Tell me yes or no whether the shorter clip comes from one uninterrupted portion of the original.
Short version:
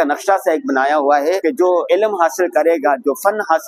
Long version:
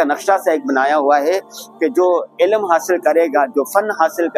no